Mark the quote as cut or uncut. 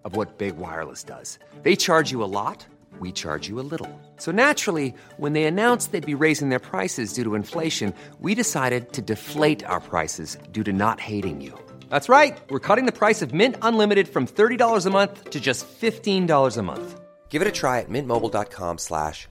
uncut